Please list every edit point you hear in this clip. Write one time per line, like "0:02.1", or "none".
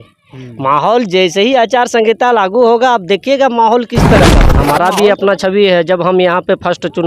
0:04.5